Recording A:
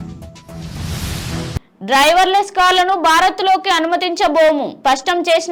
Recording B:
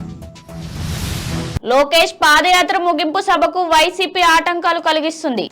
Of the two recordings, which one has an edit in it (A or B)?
B